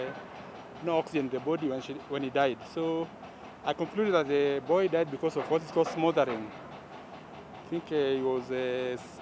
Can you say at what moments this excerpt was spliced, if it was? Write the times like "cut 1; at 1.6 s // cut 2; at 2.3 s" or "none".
cut 1; at 3.1 s